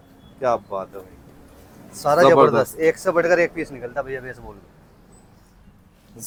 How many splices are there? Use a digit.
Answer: 0